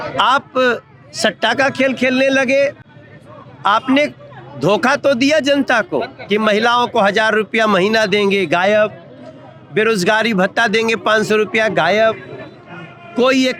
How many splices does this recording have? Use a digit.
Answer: 0